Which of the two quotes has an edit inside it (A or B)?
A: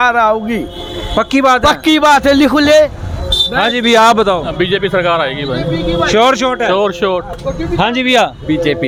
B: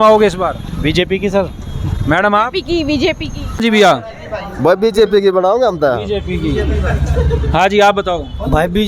B